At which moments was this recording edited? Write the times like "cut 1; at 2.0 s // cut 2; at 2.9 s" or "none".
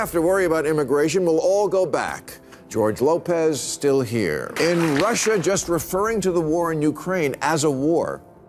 cut 1; at 4.5 s